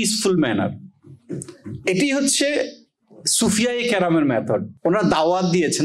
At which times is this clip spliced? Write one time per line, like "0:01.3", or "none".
0:04.7